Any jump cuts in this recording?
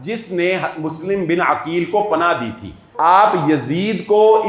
yes; 1 cut; at 2.9 s

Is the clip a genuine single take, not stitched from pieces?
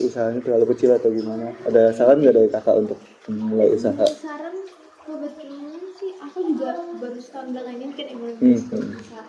yes; 0 cuts

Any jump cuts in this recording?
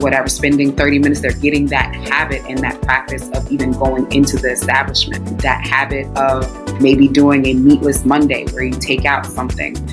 yes; 2 cuts; at 5.4 s, 6.6 s

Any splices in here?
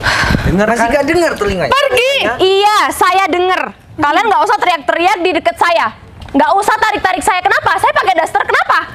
no; 0 cuts

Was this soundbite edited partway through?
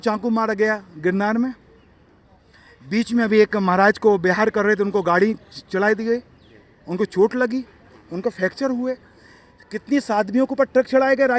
no; 0 cuts

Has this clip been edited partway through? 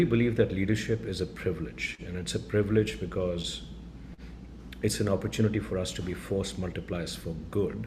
no; 0 cuts

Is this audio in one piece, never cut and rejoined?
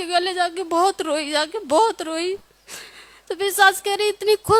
yes; 0 cuts

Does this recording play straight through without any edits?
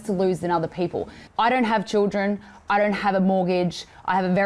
no; 1 cut; at 1.2 s

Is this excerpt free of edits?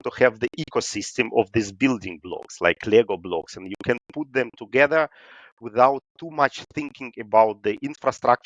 yes; 0 cuts

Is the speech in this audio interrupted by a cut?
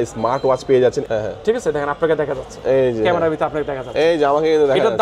yes; 1 cut; at 1.0 s

